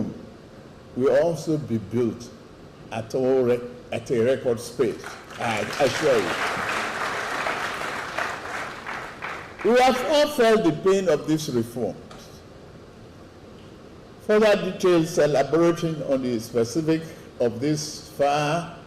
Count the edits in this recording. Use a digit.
1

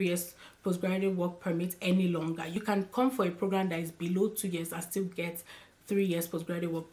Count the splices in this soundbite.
0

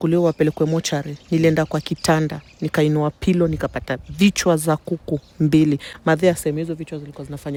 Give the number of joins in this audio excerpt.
0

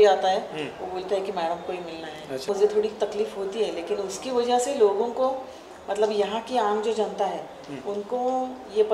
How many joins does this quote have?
1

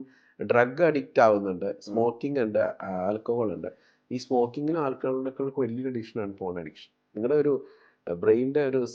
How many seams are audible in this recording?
0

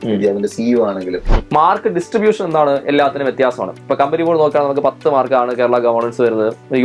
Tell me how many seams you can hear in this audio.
1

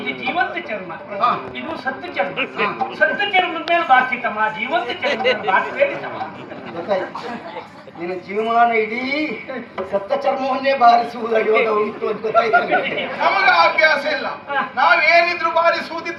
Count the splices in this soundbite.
0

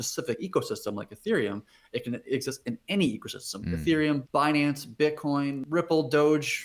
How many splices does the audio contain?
2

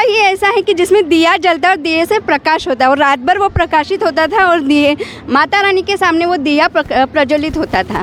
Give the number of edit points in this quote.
0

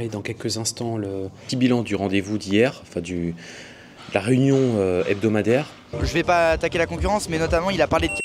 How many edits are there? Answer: 2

